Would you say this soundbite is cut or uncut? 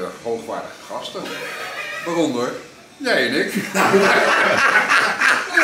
uncut